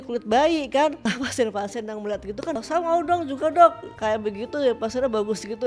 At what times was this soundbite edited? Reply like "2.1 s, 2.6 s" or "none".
1.0 s, 2.6 s